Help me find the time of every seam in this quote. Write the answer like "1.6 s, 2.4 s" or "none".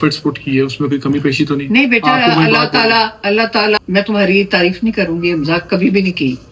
3.8 s